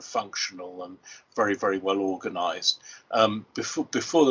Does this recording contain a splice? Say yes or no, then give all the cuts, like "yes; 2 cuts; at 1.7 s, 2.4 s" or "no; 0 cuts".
no; 0 cuts